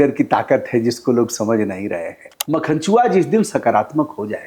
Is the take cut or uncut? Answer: cut